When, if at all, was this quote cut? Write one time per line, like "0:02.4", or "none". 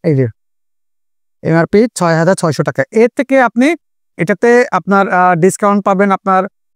none